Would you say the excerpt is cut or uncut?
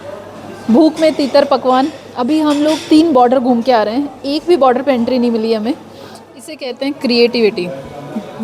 cut